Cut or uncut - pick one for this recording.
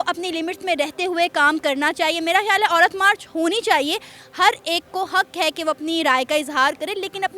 uncut